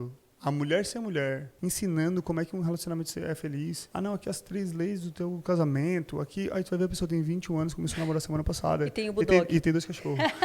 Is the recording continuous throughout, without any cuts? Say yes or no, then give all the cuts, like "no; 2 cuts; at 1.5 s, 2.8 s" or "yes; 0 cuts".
no; 2 cuts; at 1.5 s, 3.8 s